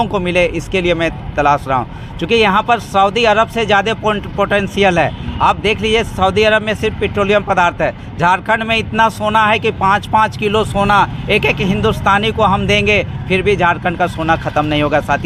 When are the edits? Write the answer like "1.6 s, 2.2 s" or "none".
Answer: none